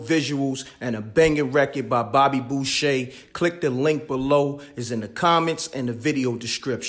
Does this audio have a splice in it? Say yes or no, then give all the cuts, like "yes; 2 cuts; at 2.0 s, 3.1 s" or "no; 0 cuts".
no; 0 cuts